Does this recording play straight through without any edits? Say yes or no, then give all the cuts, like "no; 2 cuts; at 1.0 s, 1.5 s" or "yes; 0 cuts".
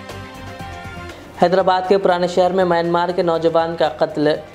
yes; 0 cuts